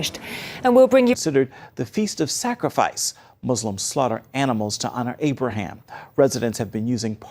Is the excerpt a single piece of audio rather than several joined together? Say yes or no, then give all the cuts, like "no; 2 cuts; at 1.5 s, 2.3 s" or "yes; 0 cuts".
yes; 0 cuts